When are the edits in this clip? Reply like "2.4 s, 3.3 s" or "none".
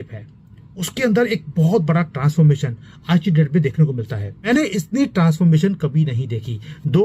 4.5 s